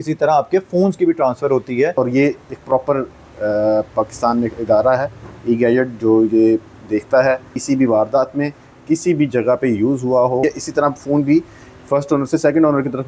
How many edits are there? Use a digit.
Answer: 3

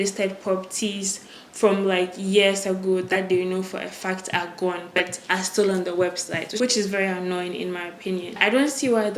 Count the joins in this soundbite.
0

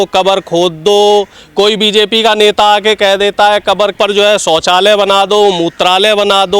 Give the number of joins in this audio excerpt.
0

